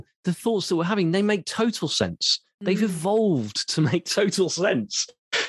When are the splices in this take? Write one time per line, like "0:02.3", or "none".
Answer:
none